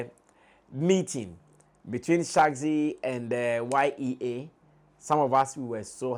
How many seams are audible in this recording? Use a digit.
0